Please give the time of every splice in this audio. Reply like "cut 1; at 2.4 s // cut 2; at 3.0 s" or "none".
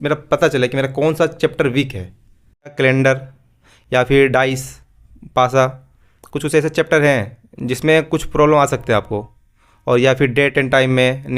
cut 1; at 2.7 s